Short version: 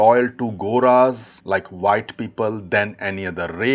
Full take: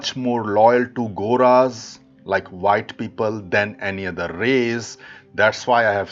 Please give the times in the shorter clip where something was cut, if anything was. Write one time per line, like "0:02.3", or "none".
0:01.3